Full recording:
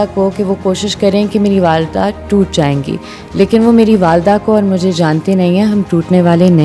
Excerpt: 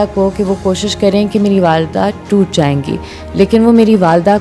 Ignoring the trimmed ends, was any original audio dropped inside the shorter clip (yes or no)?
no